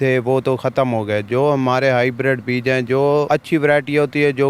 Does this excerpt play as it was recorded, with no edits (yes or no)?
no